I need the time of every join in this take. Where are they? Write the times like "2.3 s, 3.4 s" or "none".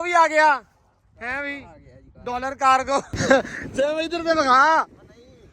3.1 s

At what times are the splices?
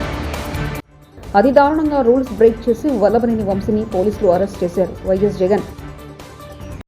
none

